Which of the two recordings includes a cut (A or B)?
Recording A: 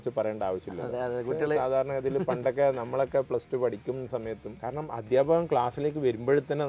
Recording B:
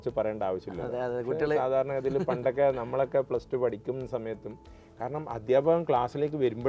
A